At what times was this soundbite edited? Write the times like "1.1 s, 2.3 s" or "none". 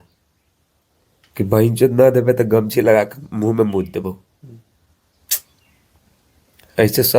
none